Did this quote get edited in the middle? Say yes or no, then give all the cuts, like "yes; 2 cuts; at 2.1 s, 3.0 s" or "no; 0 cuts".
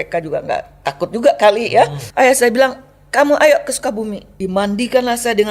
yes; 2 cuts; at 2.0 s, 4.2 s